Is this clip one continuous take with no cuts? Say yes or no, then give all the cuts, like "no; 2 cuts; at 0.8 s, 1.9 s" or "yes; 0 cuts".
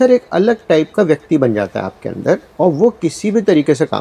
no; 1 cut; at 2.5 s